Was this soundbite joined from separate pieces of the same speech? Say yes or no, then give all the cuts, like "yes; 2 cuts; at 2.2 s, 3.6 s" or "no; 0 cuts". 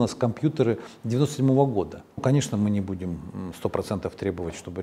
yes; 1 cut; at 2.2 s